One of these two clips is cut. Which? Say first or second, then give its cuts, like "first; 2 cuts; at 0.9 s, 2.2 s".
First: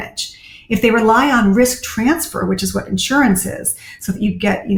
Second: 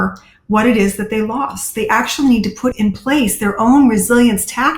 second; 1 cut; at 2.7 s